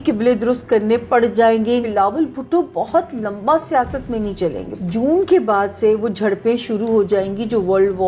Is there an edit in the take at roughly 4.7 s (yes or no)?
yes